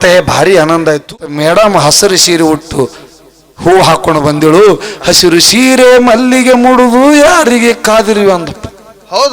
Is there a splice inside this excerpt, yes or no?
yes